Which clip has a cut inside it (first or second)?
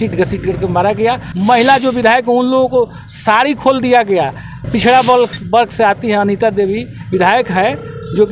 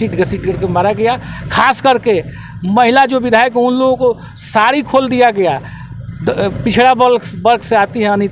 first